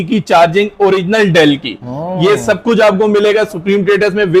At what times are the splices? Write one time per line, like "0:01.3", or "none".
none